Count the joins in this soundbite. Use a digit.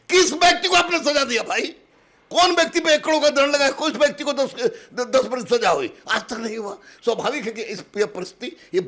0